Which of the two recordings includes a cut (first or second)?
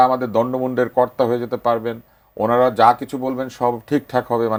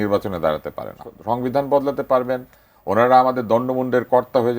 second